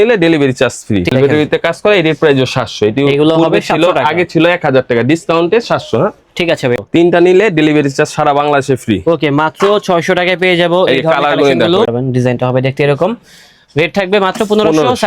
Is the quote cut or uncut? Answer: cut